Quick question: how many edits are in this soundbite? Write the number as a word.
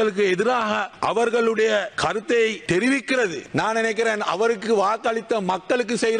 three